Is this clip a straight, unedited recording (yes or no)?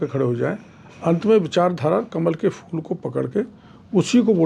yes